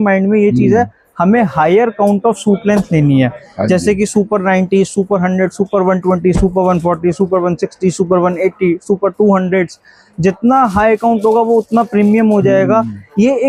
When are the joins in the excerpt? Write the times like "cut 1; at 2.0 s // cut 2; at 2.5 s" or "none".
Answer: none